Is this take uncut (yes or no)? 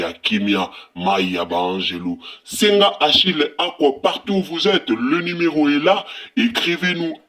yes